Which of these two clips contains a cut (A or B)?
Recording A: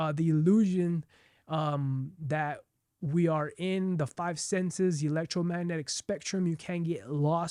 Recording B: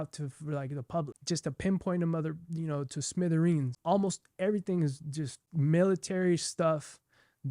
B